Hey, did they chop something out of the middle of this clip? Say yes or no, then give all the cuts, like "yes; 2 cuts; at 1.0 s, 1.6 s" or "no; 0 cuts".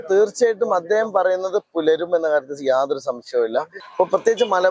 yes; 1 cut; at 3.8 s